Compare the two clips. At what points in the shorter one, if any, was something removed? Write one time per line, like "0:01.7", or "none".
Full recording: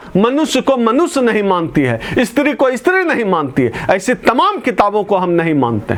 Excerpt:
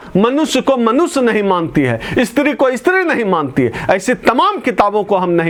none